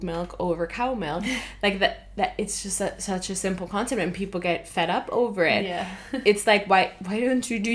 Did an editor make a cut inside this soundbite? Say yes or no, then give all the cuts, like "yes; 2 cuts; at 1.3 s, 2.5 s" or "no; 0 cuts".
no; 0 cuts